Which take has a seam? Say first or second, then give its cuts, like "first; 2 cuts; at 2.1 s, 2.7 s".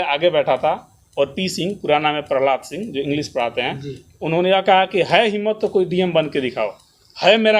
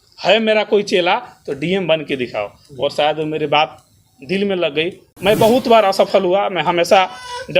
second; 1 cut; at 5.0 s